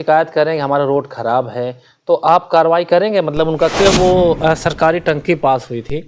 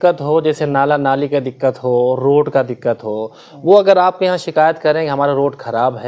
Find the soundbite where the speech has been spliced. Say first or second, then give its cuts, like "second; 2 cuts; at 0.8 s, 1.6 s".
first; 1 cut; at 3.7 s